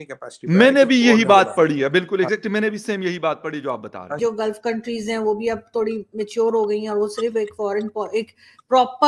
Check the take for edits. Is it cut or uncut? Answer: cut